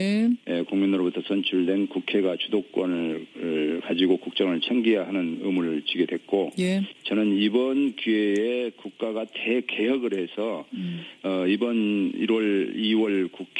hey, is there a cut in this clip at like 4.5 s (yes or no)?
yes